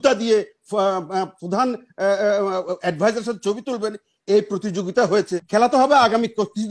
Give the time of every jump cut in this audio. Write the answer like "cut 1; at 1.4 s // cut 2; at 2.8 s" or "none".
cut 1; at 5.4 s